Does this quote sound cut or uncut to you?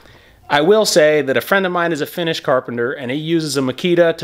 uncut